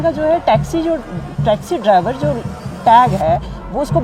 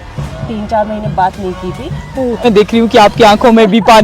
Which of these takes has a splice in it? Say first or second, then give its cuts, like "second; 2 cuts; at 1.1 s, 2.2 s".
second; 1 cut; at 2.4 s